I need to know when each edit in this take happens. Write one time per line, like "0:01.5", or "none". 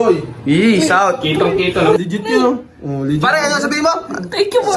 0:02.0